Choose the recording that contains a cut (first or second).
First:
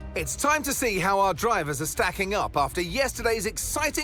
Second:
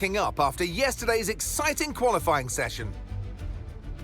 second